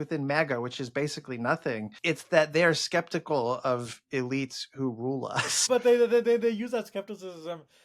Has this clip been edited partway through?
yes; 2 cuts; at 1.9 s, 5.7 s

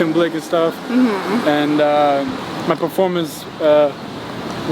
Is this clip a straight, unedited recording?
no; 1 cut; at 2.4 s

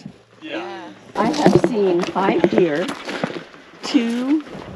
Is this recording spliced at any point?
yes; 1 cut; at 1.1 s

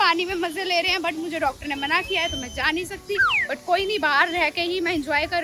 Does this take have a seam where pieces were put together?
no; 0 cuts

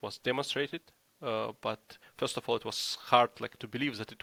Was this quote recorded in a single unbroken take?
yes; 0 cuts

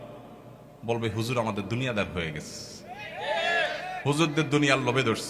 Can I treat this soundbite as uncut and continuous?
yes; 0 cuts

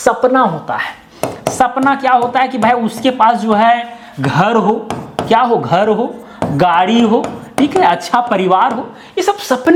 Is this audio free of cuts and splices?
yes; 0 cuts

